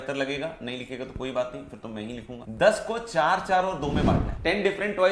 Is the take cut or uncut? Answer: cut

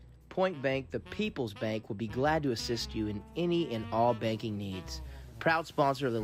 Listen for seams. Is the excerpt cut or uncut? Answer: uncut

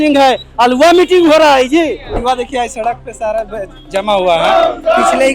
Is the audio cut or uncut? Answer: cut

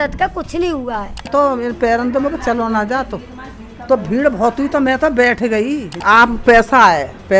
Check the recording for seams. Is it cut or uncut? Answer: cut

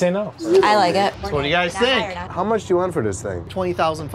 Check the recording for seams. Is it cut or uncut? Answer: cut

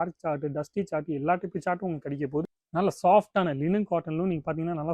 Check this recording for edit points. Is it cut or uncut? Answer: cut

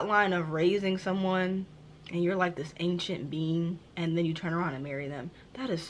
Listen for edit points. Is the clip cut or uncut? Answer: uncut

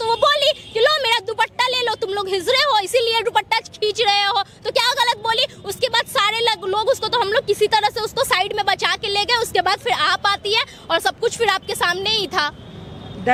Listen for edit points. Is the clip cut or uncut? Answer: uncut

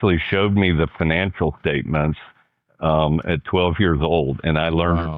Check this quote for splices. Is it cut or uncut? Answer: uncut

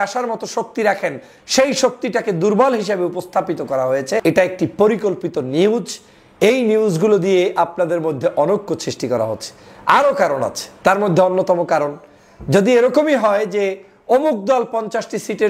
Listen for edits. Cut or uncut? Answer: cut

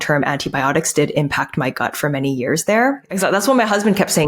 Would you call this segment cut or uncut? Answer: cut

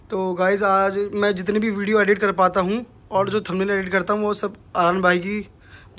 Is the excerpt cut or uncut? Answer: uncut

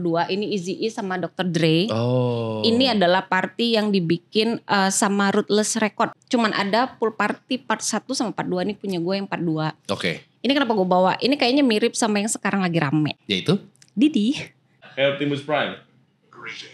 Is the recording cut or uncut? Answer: cut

